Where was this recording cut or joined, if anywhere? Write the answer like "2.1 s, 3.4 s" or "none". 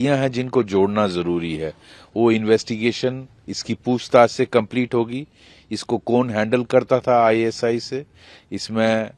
none